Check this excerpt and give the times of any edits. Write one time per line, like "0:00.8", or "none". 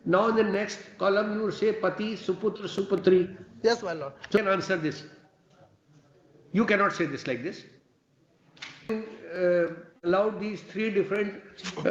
0:04.4
0:08.9